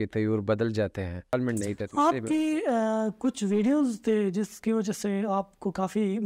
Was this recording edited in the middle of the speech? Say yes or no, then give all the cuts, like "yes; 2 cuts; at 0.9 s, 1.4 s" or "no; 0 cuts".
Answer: yes; 1 cut; at 1.3 s